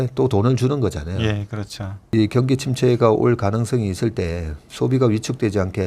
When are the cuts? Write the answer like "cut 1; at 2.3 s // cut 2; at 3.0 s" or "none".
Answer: cut 1; at 2.1 s